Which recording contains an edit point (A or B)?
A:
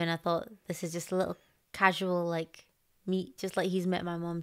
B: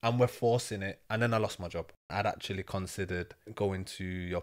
B